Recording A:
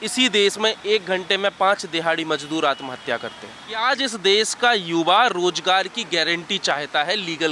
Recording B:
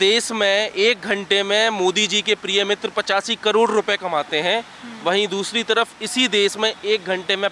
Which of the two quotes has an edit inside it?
A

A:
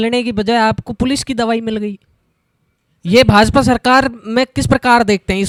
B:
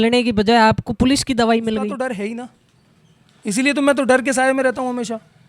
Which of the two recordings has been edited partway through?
B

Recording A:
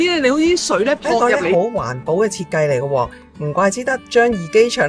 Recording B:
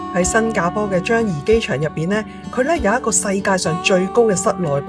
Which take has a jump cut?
A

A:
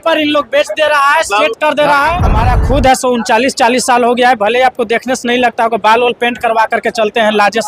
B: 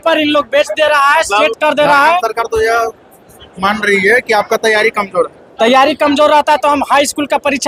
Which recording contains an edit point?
A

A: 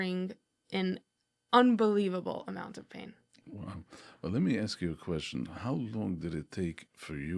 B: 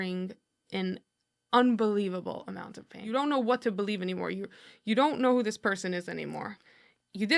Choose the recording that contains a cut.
B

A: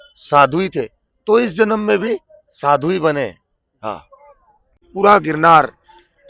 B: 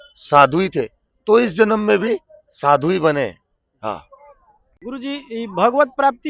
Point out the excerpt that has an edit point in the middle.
A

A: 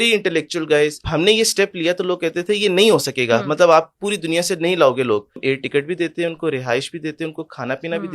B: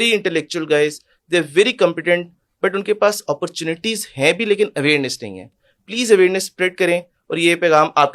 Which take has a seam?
A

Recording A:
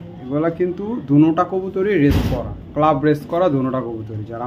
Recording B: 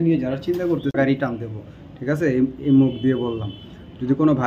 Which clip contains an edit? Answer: B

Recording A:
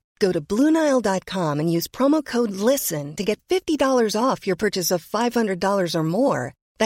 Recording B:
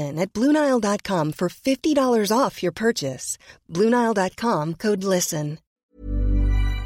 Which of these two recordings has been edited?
B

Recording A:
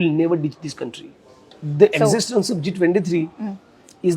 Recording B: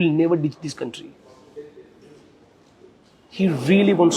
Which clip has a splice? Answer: A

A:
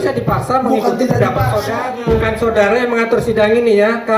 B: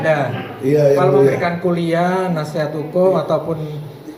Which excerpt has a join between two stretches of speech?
A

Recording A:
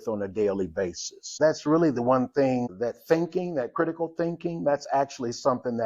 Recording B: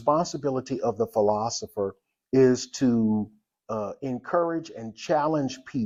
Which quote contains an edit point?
A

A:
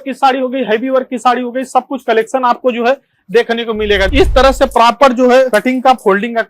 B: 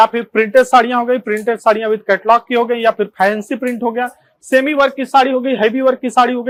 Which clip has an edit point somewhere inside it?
A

